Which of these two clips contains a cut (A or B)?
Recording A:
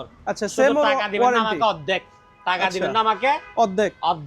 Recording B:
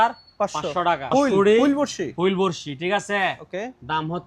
B